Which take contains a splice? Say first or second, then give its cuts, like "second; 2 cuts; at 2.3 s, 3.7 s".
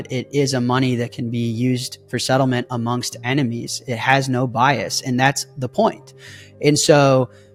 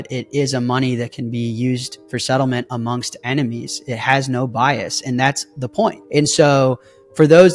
second; 1 cut; at 6.0 s